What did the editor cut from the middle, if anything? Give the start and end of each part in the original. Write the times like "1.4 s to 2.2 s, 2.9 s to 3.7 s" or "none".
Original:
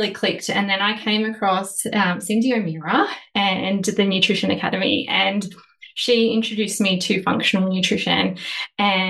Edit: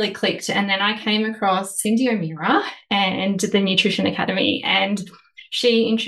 1.8 s to 2.2 s